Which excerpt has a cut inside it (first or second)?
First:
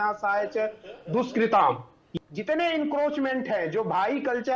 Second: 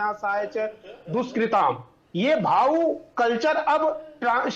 first